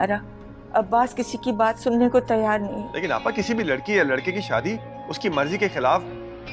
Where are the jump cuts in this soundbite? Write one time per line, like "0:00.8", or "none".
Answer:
0:02.9